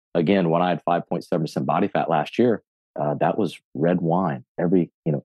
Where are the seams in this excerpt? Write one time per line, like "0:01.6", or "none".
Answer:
none